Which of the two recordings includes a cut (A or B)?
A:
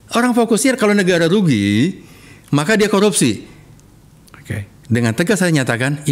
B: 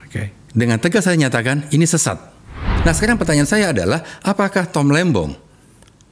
B